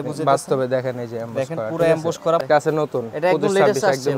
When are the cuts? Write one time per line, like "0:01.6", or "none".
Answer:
0:02.4